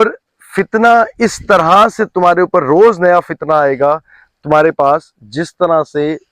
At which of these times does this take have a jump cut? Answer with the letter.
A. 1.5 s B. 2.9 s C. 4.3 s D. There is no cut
D